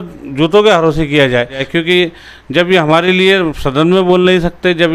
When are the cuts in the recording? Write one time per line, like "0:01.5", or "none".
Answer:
0:01.6